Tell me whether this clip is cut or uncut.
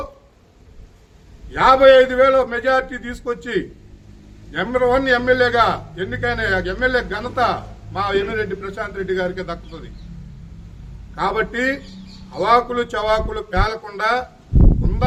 uncut